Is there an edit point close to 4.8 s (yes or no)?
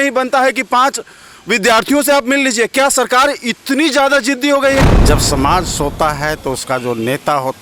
yes